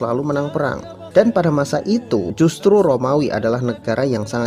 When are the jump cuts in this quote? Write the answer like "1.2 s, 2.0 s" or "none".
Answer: 0.9 s, 2.3 s